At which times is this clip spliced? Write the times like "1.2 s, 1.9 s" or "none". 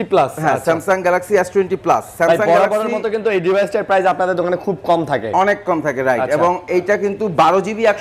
none